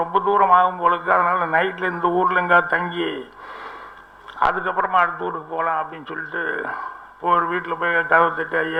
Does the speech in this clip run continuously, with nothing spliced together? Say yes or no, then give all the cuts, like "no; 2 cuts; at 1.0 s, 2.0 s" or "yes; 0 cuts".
yes; 0 cuts